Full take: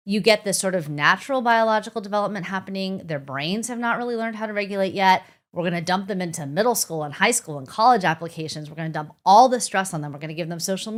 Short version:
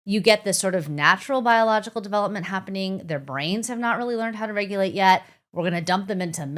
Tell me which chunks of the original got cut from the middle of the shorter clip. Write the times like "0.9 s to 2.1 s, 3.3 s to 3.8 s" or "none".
none

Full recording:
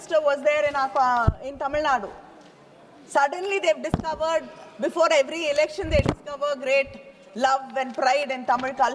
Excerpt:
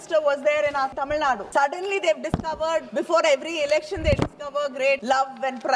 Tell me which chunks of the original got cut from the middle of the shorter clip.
0.9 s to 2.5 s, 4.5 s to 4.7 s, 6.9 s to 7.3 s

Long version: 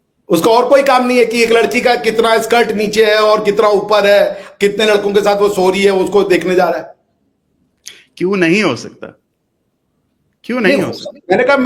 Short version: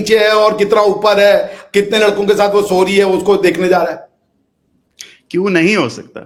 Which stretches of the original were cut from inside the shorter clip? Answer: none

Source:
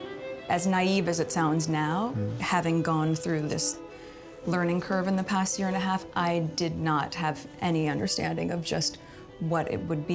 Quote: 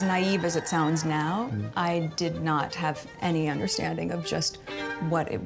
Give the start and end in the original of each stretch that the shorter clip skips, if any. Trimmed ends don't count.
2.3 s to 6.1 s

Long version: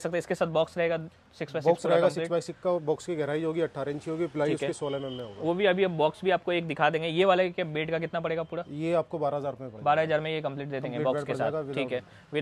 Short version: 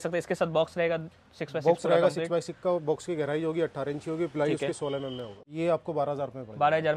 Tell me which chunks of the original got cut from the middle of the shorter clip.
5.3 s to 8.6 s

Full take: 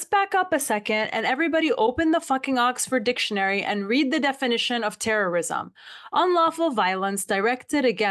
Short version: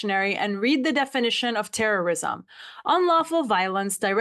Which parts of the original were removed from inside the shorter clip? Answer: none

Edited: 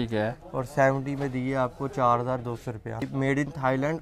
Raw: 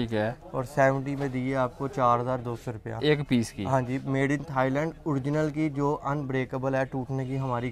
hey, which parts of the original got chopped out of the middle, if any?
3.0 s to 3.9 s

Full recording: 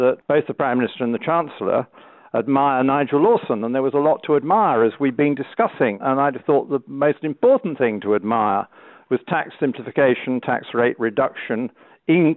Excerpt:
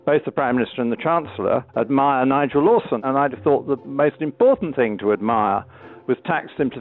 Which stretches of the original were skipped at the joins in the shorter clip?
1.9 s to 2.2 s, 3.6 s to 6.0 s

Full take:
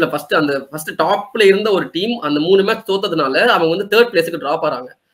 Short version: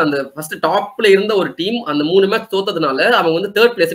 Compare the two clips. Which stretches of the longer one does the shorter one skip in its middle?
none

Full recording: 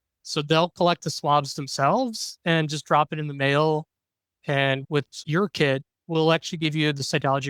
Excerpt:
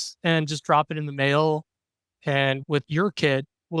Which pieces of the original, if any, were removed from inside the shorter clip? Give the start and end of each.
5.1 s to 5.2 s

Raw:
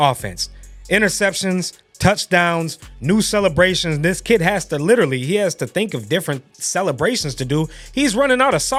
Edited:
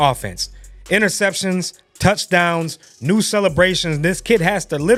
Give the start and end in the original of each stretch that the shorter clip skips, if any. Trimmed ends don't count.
none

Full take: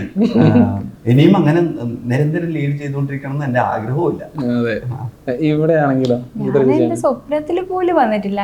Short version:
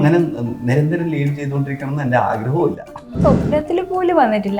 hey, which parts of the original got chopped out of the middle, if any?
4.5 s to 6.9 s

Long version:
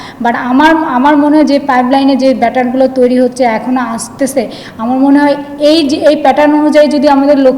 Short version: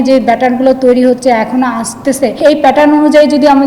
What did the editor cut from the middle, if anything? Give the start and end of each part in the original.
4.5 s to 6.0 s

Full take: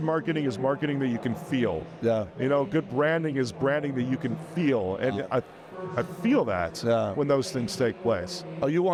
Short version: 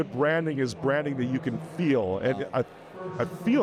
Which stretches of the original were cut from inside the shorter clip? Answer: none

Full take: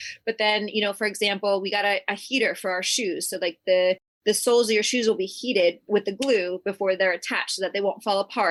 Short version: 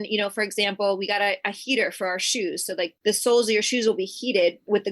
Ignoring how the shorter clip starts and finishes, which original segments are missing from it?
3.6 s to 4.1 s

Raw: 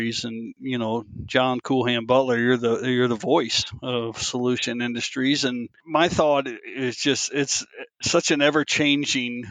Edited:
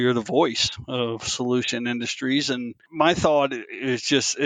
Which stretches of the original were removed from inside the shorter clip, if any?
none

